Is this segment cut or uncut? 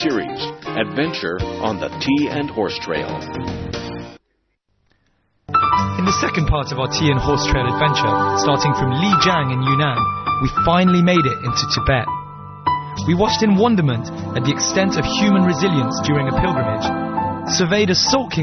uncut